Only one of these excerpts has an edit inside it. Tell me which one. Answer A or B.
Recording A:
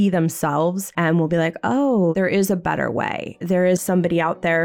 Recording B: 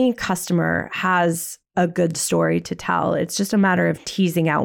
A